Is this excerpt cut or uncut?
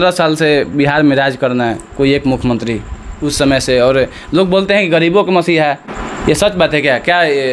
uncut